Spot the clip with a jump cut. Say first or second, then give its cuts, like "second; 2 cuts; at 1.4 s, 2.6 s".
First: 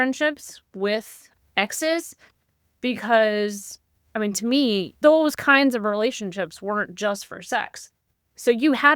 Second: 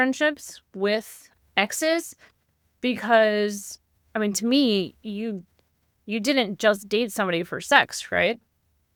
first; 1 cut; at 4.9 s